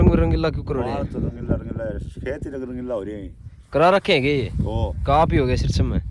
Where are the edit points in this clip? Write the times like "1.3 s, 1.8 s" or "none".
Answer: none